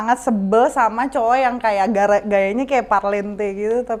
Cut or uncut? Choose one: uncut